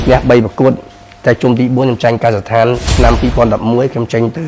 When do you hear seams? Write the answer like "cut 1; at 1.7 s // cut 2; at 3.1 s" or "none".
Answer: cut 1; at 2.9 s

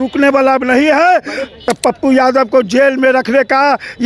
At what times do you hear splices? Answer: cut 1; at 1.5 s

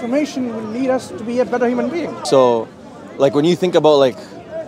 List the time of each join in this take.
cut 1; at 2.2 s

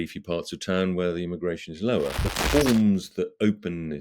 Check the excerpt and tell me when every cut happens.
cut 1; at 2.3 s

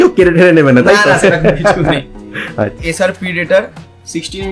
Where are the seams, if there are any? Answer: cut 1; at 2.9 s

